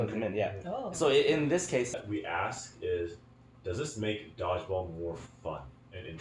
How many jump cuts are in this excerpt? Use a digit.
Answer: 1